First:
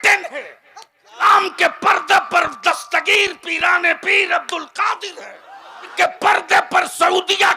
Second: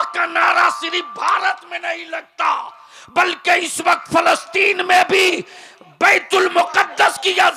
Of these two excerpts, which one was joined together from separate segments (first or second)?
first